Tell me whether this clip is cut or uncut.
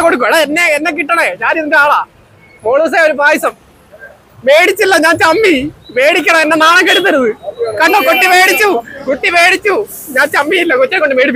uncut